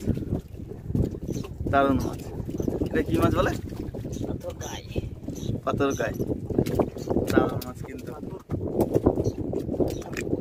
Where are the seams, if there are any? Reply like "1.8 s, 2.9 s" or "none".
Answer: none